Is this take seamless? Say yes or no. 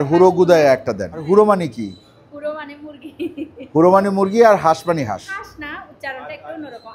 no